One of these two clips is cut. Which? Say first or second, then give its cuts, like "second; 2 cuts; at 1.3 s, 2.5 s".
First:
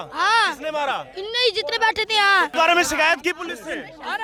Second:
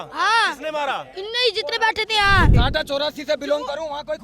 second; 1 cut; at 2.5 s